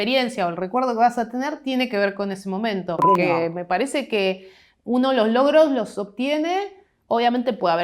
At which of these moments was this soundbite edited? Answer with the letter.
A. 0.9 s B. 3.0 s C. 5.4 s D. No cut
B